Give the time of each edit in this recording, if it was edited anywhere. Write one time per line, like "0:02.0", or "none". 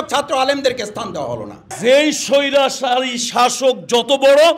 0:01.7